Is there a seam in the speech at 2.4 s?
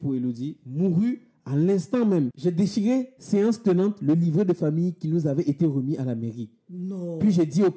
yes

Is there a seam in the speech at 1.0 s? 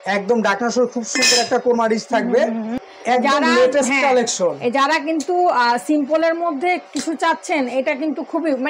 no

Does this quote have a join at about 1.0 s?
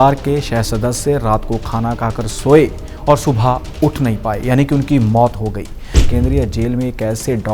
no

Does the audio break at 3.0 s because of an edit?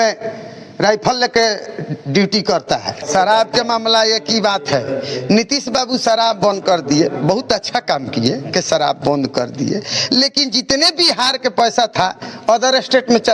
yes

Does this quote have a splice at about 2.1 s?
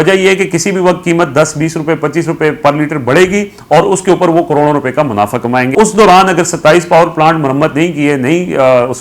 no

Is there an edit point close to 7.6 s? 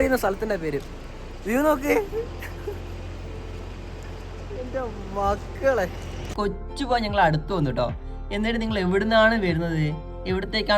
no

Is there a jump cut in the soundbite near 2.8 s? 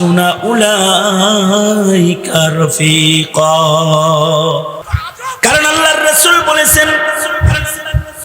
no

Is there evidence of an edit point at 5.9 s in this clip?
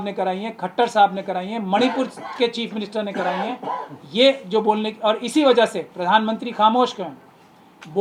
no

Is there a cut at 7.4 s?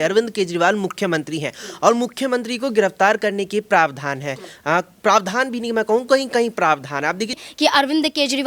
yes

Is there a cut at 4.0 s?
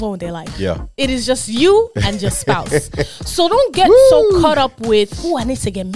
no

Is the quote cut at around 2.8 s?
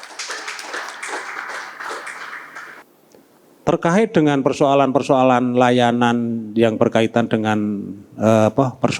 yes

